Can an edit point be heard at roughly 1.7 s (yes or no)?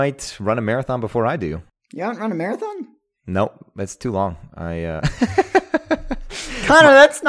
yes